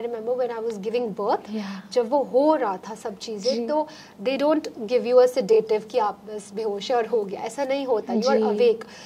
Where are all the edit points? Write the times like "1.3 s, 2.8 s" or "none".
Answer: none